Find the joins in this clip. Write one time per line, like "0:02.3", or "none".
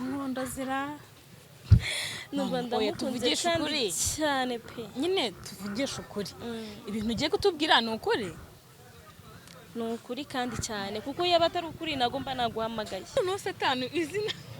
0:13.2